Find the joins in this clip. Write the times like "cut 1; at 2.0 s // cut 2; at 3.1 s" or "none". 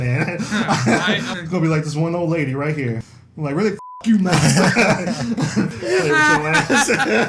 cut 1; at 1.3 s // cut 2; at 3.1 s // cut 3; at 5.8 s